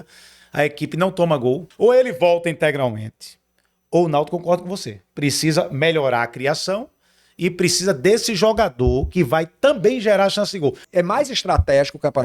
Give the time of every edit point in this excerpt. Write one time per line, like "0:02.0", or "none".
0:01.7
0:10.8

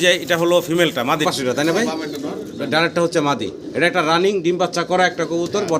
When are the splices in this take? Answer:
0:01.2

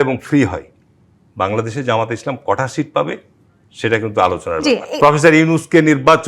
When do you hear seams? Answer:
0:04.9

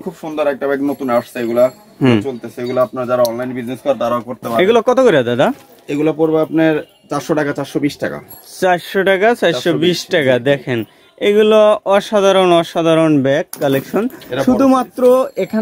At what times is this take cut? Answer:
none

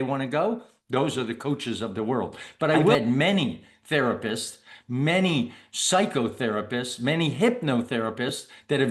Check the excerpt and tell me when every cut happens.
0:03.0

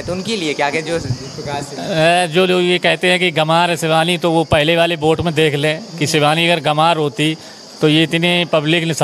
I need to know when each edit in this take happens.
none

